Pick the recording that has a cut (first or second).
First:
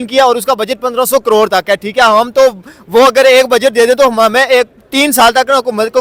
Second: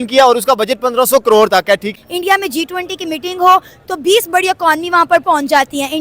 second